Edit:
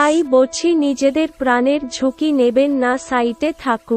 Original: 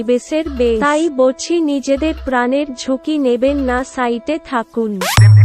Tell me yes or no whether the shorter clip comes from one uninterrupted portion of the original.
yes